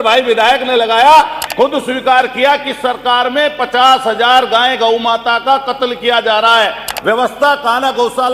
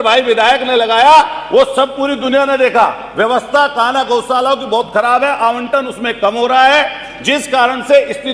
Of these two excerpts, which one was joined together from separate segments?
first; 2 cuts; at 1.4 s, 6.9 s

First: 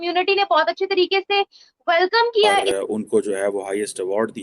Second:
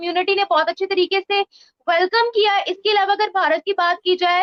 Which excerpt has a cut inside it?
first; 1 cut; at 2.6 s

